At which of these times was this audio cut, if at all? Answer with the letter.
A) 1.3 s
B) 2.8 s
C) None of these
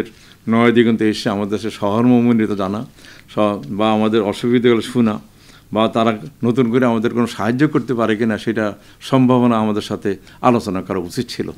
C